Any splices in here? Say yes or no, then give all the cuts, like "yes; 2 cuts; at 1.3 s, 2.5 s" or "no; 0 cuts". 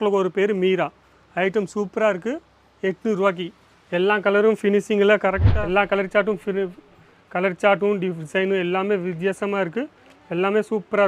yes; 1 cut; at 5.4 s